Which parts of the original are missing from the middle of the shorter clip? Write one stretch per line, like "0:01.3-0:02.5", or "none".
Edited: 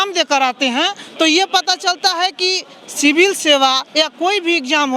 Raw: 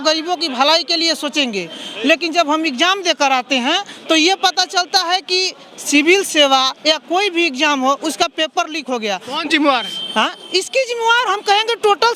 none